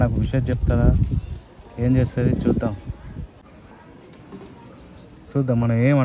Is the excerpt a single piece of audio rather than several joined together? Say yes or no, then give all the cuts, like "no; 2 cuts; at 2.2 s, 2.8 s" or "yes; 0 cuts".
no; 1 cut; at 3.4 s